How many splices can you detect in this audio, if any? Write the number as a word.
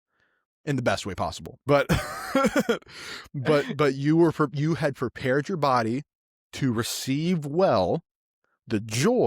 one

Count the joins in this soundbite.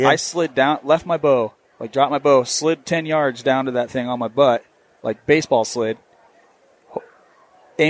zero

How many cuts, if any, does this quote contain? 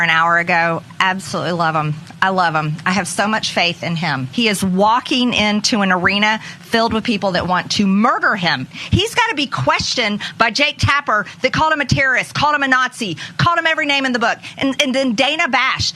two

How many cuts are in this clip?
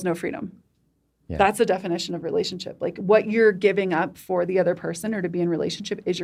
zero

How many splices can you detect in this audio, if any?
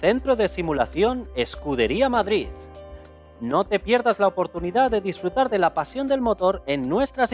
zero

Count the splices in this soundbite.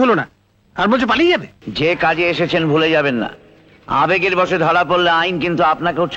one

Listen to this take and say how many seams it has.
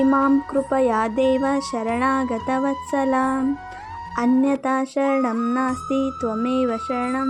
zero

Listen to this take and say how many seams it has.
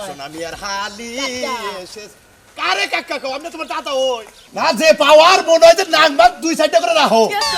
one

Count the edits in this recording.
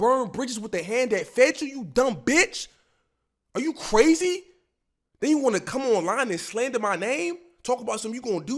zero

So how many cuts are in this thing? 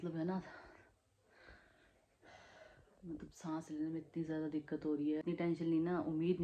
one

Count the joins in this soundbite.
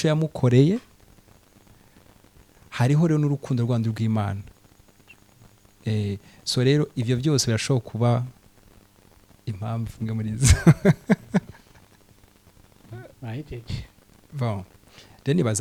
zero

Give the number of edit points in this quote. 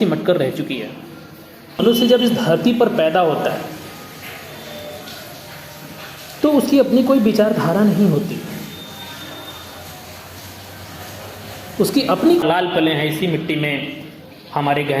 two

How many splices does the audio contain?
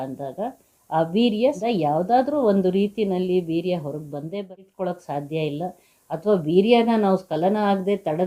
two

